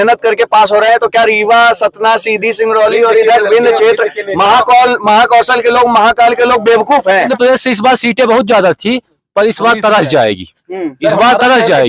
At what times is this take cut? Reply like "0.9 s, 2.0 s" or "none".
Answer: 7.3 s